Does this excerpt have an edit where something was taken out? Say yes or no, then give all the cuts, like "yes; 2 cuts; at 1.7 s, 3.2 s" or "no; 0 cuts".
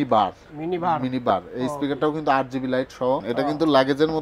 yes; 1 cut; at 3.3 s